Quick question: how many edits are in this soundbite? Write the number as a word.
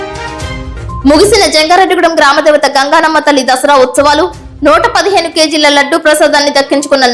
one